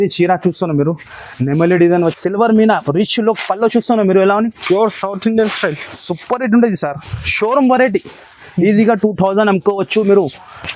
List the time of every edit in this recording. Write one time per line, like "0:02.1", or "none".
0:02.2